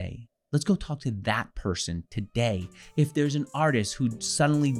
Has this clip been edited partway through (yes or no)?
no